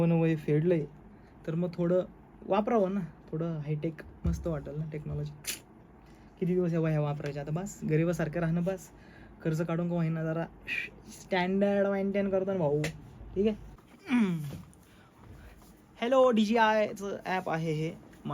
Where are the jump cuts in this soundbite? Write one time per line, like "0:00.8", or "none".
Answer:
0:13.7